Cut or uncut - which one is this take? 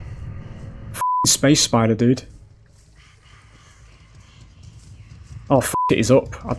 uncut